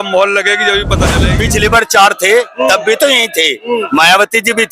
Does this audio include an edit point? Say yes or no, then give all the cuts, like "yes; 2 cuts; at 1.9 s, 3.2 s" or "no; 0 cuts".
yes; 1 cut; at 1.3 s